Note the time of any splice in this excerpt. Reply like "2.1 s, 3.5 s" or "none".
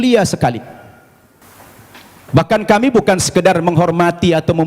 none